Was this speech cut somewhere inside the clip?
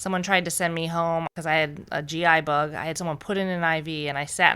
yes; 1 cut; at 1.3 s

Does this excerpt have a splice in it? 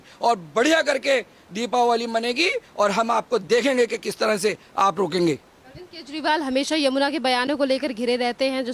no; 0 cuts

